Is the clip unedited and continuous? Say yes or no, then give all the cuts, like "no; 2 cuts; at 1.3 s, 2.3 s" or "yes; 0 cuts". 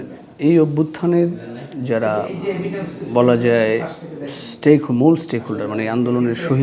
yes; 0 cuts